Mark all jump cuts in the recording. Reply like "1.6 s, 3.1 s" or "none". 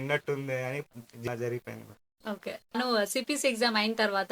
1.3 s

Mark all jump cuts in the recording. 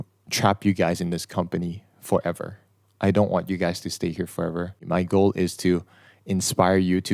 4.8 s

